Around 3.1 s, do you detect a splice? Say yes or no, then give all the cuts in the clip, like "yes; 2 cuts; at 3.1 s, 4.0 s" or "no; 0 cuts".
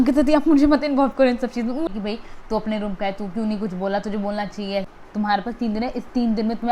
no; 2 cuts; at 1.9 s, 4.9 s